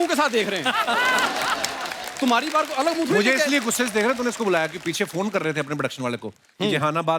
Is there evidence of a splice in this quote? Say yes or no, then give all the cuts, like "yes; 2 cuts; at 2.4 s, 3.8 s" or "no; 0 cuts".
no; 0 cuts